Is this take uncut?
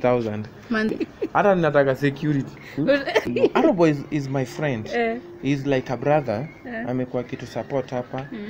no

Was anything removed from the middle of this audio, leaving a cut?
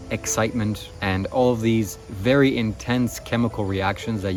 no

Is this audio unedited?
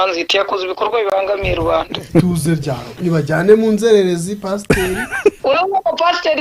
no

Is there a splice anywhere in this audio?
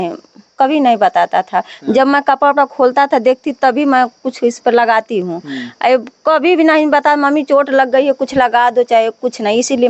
no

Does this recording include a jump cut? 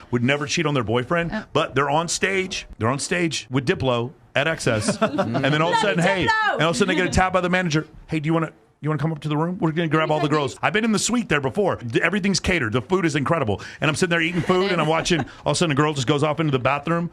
yes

